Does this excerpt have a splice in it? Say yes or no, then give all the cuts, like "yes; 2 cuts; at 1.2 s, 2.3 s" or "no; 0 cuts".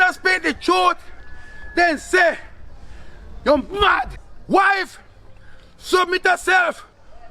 yes; 1 cut; at 4.1 s